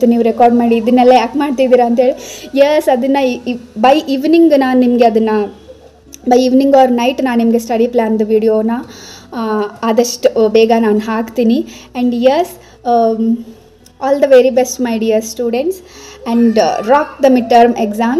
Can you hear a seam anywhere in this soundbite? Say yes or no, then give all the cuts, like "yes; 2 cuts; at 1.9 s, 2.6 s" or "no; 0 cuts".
no; 0 cuts